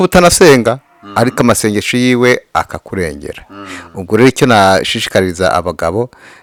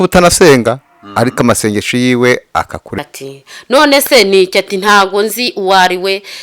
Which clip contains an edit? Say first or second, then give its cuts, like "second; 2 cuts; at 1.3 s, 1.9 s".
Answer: second; 1 cut; at 3.0 s